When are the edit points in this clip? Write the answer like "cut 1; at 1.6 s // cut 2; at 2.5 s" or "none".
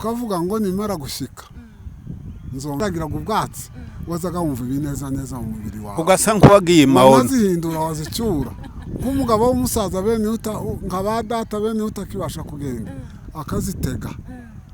cut 1; at 2.8 s